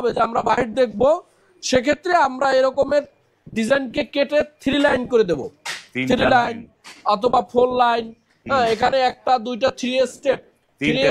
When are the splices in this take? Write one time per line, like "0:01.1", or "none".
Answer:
none